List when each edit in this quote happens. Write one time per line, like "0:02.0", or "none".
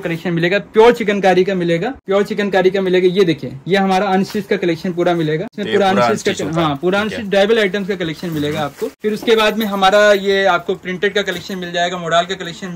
0:01.9
0:05.5
0:09.0